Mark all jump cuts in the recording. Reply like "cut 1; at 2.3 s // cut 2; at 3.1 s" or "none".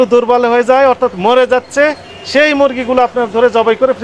none